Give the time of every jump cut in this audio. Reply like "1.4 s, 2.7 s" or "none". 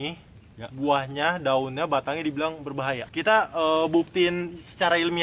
3.0 s

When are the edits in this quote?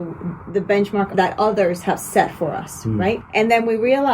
1.1 s, 3.2 s

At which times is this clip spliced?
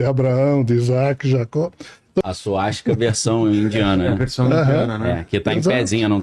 2.2 s

